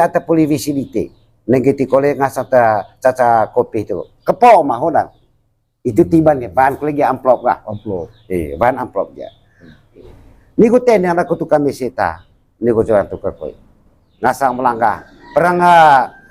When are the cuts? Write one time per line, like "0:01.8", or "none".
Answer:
0:10.1